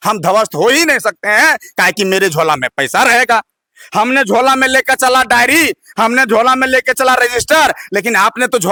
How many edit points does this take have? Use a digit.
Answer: 0